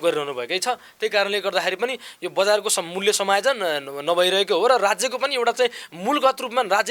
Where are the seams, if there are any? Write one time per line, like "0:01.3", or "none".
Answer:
none